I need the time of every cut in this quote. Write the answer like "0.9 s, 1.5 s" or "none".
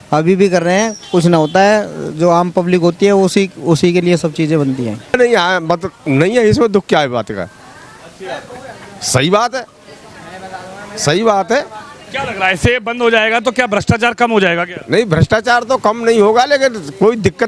5.1 s